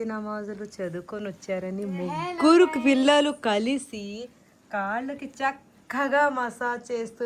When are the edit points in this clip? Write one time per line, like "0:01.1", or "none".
none